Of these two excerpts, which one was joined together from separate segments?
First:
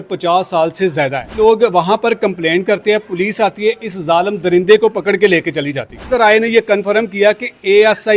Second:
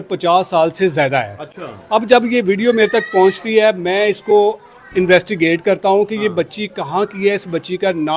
first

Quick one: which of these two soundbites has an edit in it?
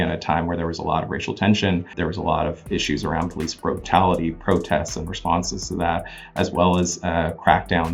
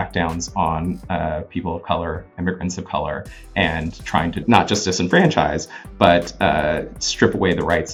first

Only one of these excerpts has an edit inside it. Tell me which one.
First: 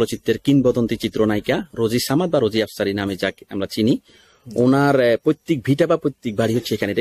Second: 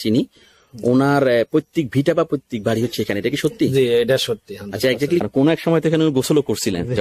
second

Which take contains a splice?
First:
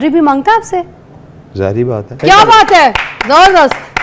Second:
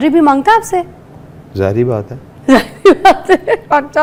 first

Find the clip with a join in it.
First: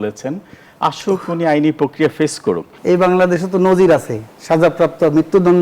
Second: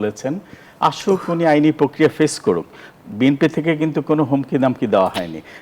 first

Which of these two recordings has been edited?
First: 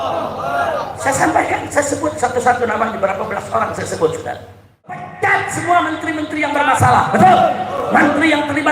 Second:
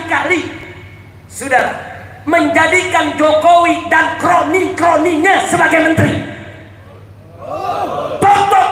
first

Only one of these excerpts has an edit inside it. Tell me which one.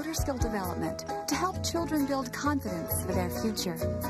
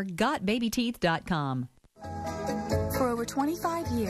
second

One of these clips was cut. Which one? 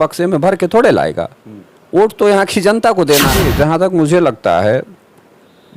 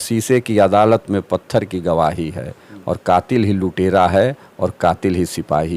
first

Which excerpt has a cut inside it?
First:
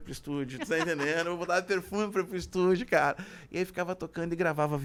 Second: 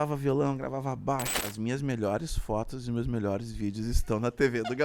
second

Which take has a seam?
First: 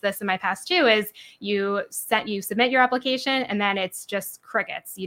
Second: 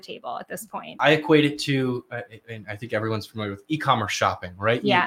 second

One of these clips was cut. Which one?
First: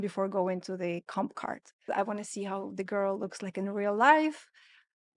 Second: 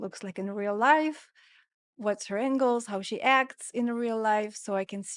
first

